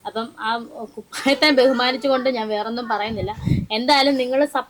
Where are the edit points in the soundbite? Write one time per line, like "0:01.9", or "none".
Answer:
none